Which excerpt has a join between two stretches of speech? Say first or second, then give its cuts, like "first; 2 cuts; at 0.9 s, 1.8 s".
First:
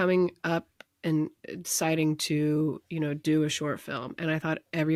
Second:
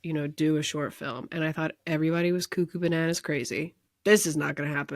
second; 1 cut; at 3.9 s